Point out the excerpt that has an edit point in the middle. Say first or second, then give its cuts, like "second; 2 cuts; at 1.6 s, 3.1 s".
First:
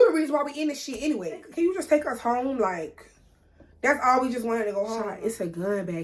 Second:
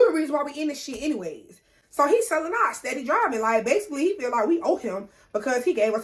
first; 2 cuts; at 1.5 s, 4.9 s